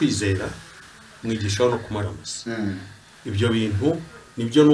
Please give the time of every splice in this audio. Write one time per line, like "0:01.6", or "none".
none